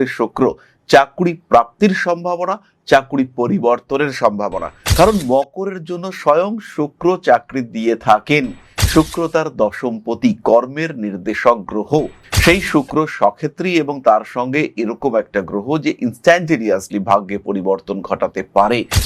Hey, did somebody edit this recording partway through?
no; 0 cuts

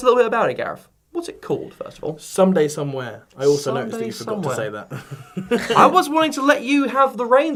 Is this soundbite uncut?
yes; 0 cuts

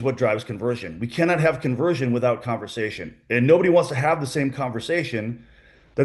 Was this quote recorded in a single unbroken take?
yes; 0 cuts

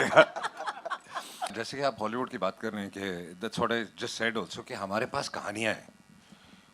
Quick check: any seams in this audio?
yes; 1 cut; at 1.5 s

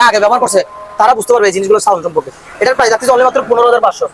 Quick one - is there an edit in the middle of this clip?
no; 0 cuts

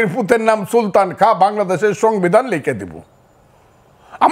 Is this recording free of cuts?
yes; 0 cuts

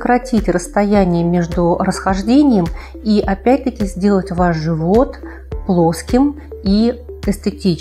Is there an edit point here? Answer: no; 0 cuts

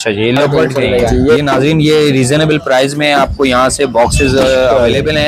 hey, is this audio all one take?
no; 1 cut; at 1.4 s

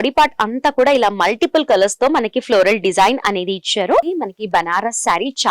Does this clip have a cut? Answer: yes; 1 cut; at 4.1 s

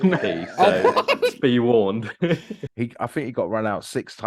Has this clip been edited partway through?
yes; 1 cut; at 2.6 s

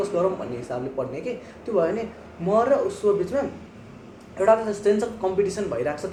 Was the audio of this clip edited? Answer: no; 0 cuts

